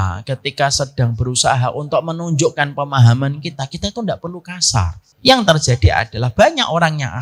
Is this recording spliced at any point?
yes; 1 cut; at 5.0 s

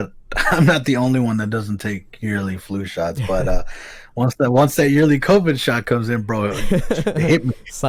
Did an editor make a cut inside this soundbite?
no; 0 cuts

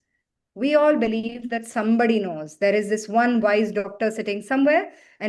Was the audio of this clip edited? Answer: no; 0 cuts

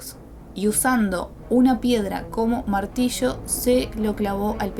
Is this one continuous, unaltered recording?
yes; 0 cuts

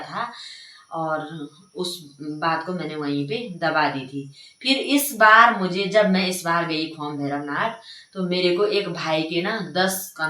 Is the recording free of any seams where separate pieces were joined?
yes; 0 cuts

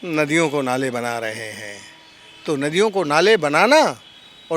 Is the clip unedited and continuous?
yes; 0 cuts

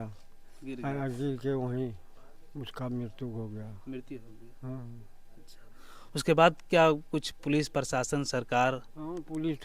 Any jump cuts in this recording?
no; 0 cuts

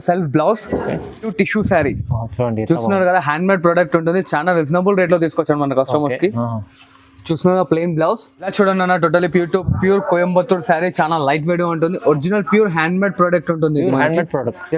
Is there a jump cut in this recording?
yes; 2 cuts; at 1.3 s, 8.4 s

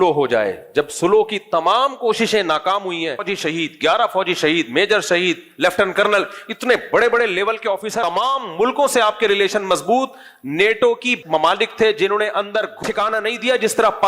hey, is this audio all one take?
no; 3 cuts; at 3.3 s, 8.0 s, 12.8 s

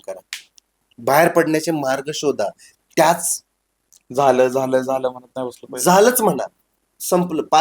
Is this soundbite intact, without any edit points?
yes; 0 cuts

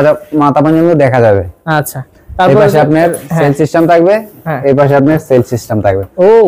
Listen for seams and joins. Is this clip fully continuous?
yes; 0 cuts

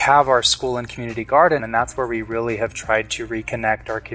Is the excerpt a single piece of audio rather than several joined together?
no; 1 cut; at 1.6 s

